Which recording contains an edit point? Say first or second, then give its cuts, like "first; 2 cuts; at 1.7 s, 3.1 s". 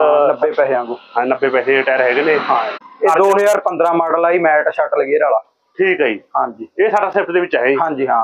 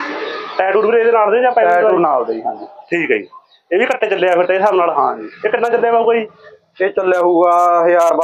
first; 1 cut; at 2.8 s